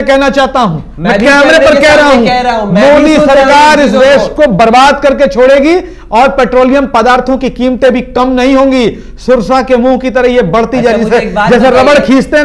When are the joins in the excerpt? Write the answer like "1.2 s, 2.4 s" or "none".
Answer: none